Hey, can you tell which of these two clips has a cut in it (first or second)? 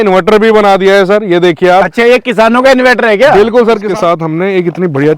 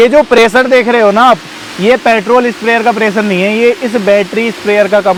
first